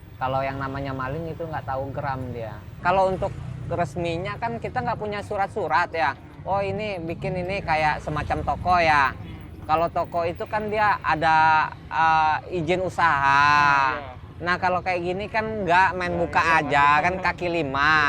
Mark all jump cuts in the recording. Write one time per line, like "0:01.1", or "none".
0:02.6